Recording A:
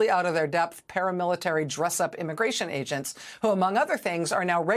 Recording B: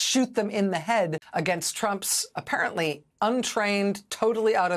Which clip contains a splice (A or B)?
B